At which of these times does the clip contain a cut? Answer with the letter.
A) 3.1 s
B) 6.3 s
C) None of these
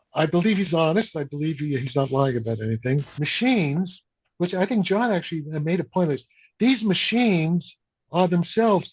A